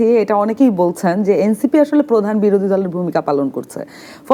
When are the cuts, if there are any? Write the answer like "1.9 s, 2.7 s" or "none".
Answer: none